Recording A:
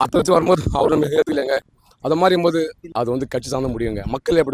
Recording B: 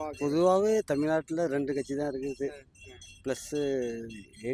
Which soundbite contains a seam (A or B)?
A